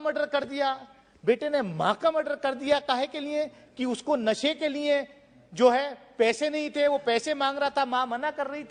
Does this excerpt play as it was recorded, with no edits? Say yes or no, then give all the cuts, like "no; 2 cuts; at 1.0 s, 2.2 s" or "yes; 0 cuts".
yes; 0 cuts